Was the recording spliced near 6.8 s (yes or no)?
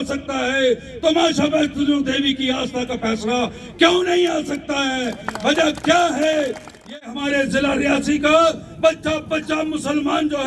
yes